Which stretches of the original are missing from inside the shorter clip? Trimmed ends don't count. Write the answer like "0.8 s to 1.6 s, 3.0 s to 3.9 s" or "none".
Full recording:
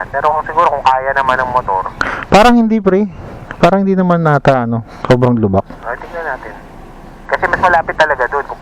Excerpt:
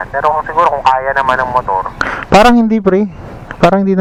none